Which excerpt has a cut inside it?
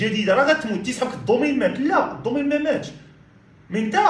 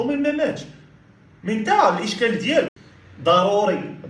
second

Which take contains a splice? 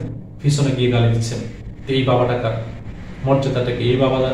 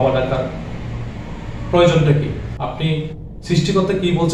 second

